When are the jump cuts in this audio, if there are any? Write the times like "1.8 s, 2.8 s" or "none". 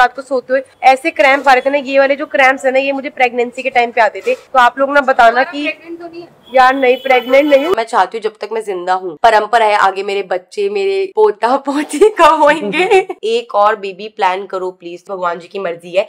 7.8 s, 9.1 s, 13.2 s, 15.0 s